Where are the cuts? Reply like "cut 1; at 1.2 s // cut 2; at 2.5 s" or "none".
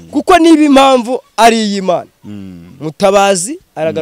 none